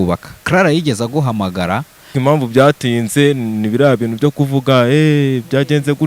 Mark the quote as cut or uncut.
cut